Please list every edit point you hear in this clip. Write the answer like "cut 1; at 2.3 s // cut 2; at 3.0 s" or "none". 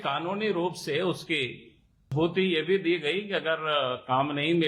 cut 1; at 2.1 s

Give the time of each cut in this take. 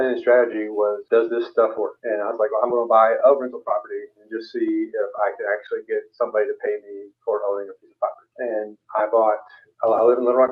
cut 1; at 1.0 s // cut 2; at 2.0 s // cut 3; at 8.2 s

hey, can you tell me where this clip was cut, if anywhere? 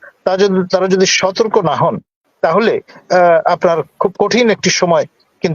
none

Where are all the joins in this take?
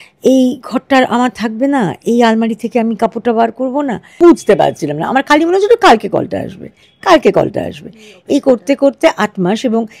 cut 1; at 4.2 s

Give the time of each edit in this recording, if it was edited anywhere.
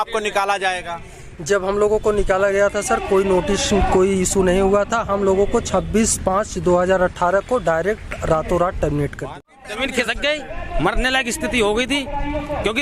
cut 1; at 9.2 s

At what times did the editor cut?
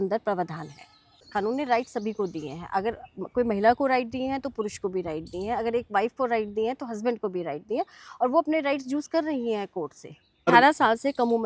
cut 1; at 1.2 s // cut 2; at 10.5 s

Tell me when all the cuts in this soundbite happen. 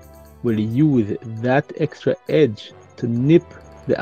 cut 1; at 2.9 s

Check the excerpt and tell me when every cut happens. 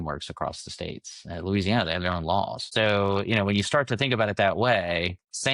cut 1; at 2.6 s

